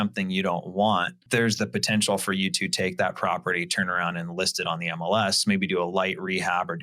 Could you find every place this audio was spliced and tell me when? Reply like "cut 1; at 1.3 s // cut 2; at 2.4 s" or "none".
cut 1; at 1.2 s